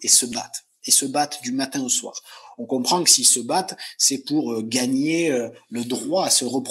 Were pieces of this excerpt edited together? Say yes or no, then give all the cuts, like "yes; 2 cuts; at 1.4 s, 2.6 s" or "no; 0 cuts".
no; 0 cuts